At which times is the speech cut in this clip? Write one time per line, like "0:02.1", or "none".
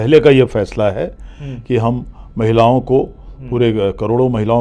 none